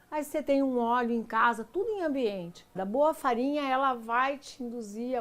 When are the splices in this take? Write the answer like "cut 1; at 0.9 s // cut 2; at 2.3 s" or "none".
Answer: cut 1; at 2.8 s